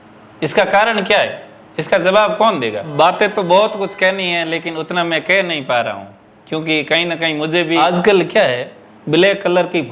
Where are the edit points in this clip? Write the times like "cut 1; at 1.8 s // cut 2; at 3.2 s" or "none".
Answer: cut 1; at 2.9 s // cut 2; at 7.8 s